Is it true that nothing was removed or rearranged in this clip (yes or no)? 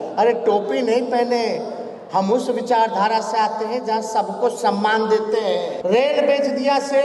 no